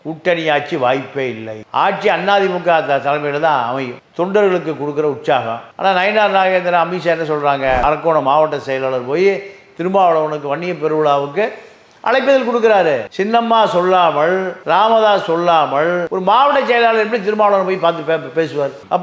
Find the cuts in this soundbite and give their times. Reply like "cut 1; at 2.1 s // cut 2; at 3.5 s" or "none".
cut 1; at 7.8 s